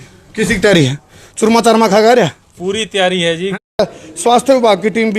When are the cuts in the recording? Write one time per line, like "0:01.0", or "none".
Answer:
0:03.8